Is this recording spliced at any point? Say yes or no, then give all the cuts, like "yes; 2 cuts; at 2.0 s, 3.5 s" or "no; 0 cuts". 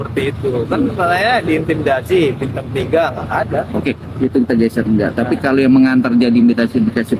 no; 0 cuts